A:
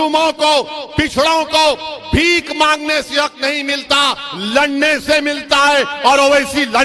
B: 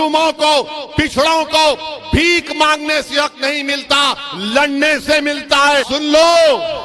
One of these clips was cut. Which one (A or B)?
B